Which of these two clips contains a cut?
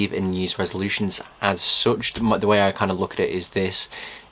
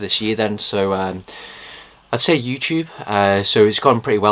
first; 1 cut; at 3.3 s

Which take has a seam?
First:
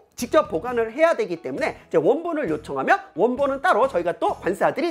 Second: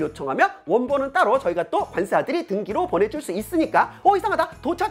second; 1 cut; at 3.9 s

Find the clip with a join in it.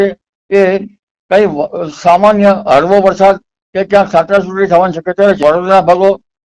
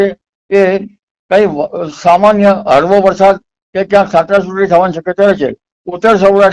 first; 1 cut; at 5.4 s

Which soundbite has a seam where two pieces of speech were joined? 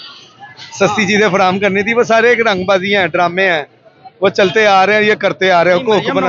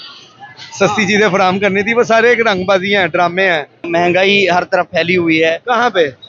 second; 1 cut; at 3.9 s

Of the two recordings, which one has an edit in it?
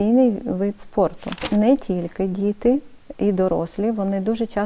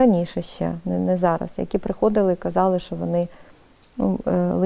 first; 1 cut; at 1.5 s

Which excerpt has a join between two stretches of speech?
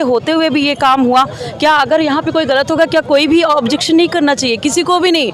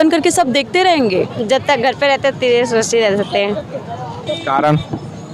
second; 1 cut; at 1.4 s

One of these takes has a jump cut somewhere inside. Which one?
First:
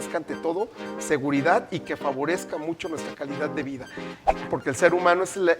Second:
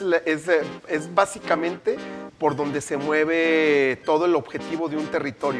first; 1 cut; at 4.3 s

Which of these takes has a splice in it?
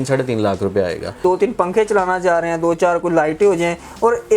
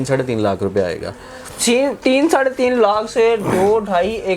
first; 1 cut; at 1.2 s

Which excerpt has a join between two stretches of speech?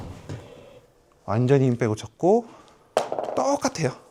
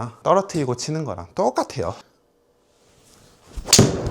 second; 1 cut; at 2.0 s

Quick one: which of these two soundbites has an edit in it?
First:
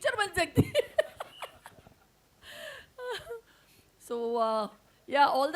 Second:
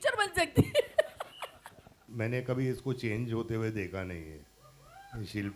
second; 1 cut; at 2.0 s

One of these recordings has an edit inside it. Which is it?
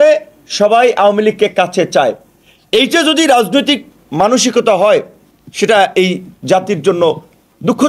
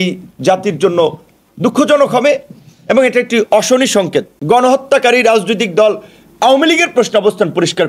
second; 1 cut; at 4.3 s

